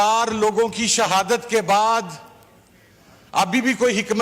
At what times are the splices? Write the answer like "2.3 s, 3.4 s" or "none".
none